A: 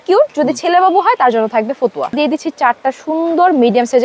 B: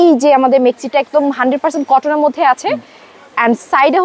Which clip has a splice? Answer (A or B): A